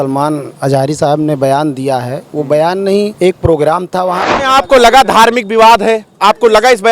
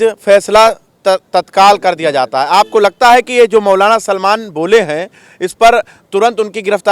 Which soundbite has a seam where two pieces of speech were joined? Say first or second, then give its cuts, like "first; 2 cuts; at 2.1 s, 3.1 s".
first; 2 cuts; at 3.1 s, 4.3 s